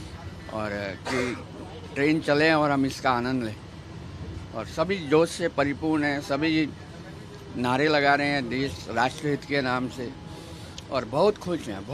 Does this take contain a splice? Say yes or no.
no